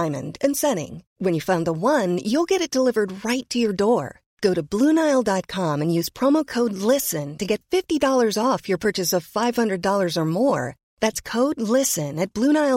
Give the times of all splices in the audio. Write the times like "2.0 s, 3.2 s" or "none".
none